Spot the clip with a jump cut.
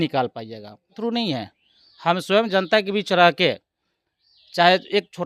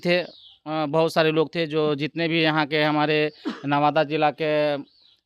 first; 1 cut; at 0.9 s

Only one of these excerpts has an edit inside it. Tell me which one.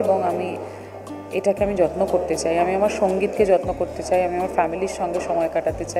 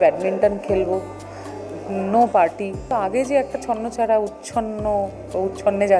second; 1 cut; at 2.9 s

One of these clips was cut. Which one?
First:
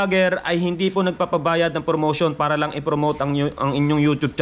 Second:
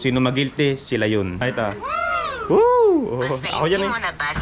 second; 1 cut; at 1.4 s

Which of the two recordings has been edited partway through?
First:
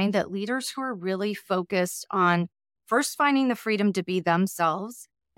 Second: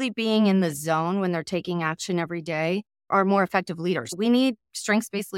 second; 1 cut; at 4.1 s

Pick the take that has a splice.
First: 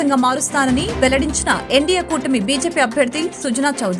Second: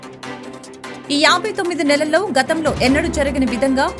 second; 1 cut; at 1.0 s

